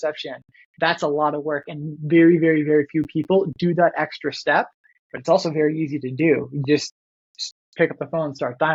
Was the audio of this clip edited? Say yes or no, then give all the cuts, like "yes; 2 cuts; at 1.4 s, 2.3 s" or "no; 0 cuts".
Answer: no; 0 cuts